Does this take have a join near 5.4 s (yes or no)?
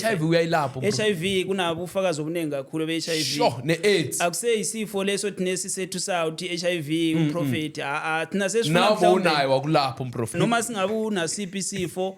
no